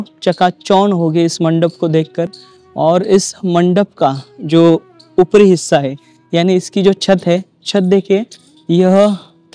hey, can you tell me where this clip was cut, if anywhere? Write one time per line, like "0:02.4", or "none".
none